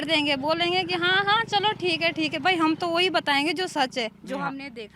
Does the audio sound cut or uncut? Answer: uncut